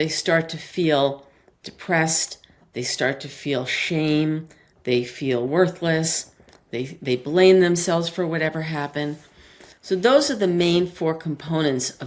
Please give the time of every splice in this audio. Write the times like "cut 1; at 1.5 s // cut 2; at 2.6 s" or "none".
none